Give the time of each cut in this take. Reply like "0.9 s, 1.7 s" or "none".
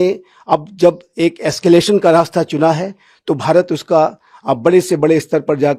none